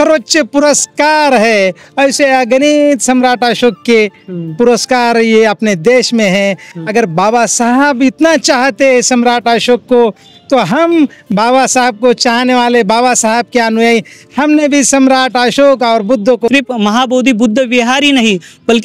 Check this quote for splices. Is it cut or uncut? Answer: cut